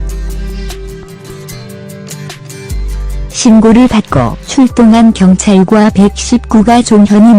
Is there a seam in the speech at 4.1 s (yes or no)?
yes